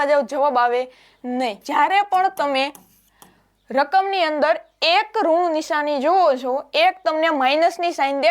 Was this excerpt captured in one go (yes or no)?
no